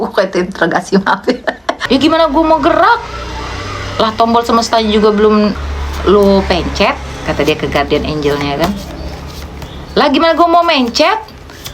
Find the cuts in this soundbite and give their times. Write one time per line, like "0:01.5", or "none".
0:01.7
0:05.6